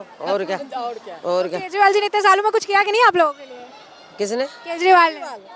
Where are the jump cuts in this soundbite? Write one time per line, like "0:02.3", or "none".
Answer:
none